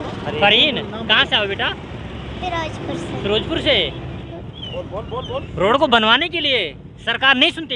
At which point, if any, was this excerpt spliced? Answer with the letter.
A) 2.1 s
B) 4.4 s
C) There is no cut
B